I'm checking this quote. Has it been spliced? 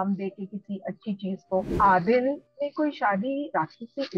yes; 1 cut; at 1.7 s

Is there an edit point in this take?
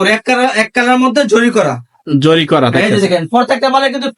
no; 0 cuts

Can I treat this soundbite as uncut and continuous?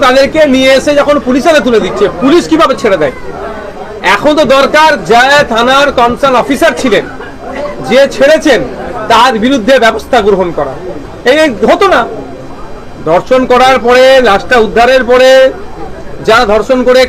yes; 0 cuts

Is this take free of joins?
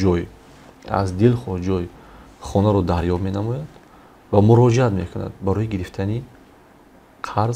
yes; 0 cuts

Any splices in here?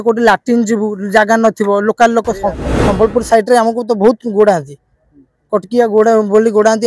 yes; 1 cut; at 2.7 s

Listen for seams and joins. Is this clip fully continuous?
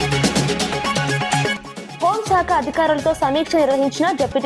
no; 1 cut; at 1.5 s

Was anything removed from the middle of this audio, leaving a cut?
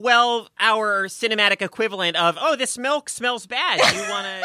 no; 0 cuts

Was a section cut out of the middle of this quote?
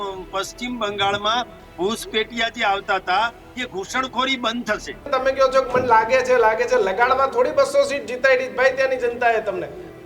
yes; 1 cut; at 5.1 s

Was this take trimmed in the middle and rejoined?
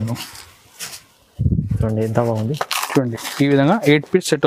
no; 0 cuts

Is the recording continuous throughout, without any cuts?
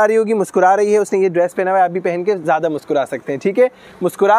yes; 0 cuts

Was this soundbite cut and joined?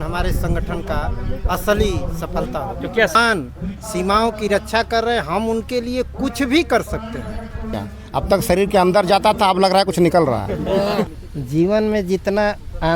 yes; 3 cuts; at 3.1 s, 7.7 s, 11.1 s

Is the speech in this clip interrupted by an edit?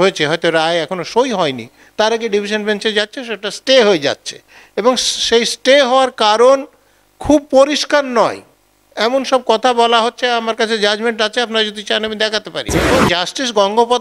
yes; 1 cut; at 12.9 s

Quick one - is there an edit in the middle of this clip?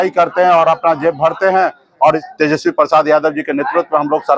yes; 1 cut; at 2.2 s

